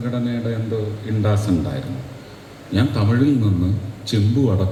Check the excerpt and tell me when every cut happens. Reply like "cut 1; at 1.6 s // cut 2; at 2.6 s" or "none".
none